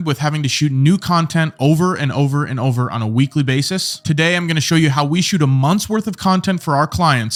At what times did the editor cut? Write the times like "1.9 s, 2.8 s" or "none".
none